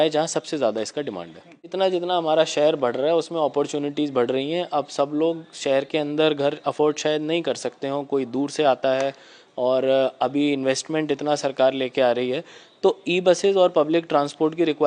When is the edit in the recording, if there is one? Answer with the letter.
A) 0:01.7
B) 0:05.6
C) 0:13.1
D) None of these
A